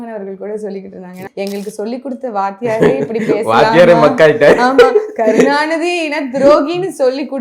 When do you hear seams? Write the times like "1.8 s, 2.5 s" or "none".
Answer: 1.1 s